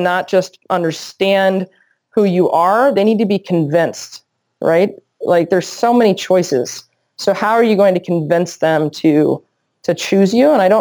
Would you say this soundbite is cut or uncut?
uncut